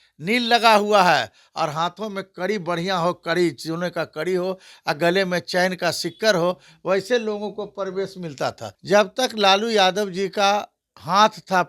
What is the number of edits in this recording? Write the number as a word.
one